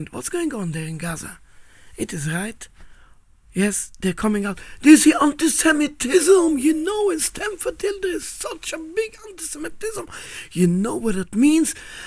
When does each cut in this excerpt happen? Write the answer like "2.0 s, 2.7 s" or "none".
none